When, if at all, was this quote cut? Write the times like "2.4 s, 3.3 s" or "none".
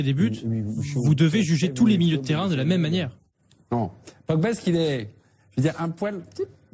4.9 s